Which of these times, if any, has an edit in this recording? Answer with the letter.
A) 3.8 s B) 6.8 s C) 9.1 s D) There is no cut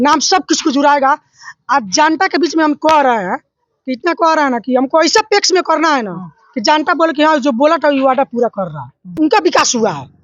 C